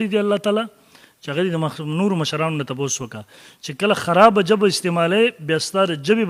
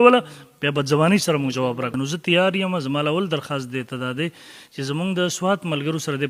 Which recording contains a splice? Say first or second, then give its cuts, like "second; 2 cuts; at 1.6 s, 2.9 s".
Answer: second; 1 cut; at 1.9 s